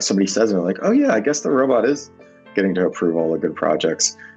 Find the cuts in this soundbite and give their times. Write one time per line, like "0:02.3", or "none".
none